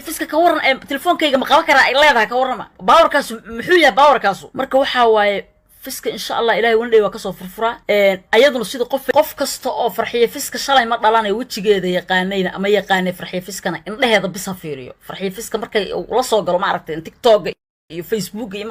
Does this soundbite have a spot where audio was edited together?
no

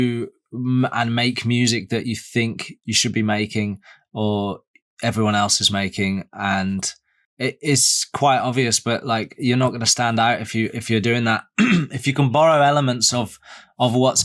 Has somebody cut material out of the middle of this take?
no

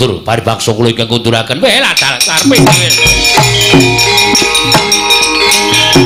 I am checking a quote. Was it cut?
no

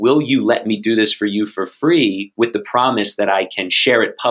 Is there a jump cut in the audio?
no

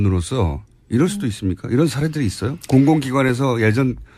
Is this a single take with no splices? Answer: yes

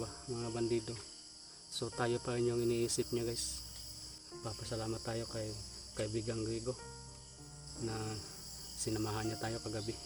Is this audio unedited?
no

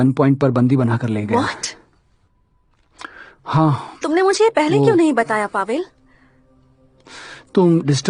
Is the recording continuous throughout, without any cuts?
yes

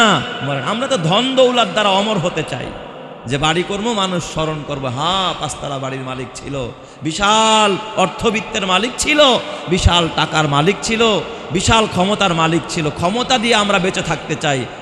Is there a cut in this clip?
no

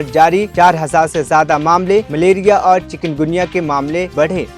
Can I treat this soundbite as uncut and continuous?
yes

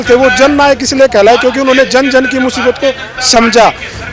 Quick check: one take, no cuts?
yes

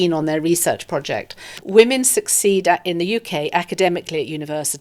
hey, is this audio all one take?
no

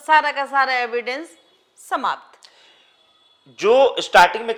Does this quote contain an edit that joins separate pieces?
no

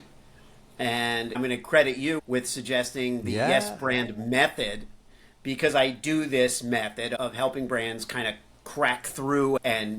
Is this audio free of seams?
no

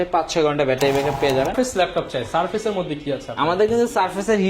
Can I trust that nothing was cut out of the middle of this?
no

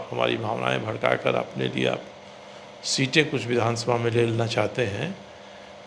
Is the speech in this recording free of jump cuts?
yes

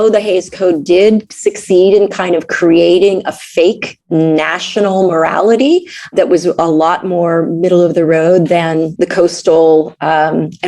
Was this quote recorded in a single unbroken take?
no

